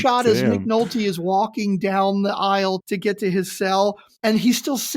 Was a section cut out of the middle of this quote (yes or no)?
yes